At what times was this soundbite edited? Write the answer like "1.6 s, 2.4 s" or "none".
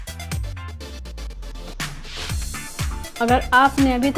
3.1 s